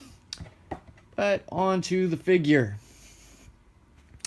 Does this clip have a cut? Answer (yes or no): yes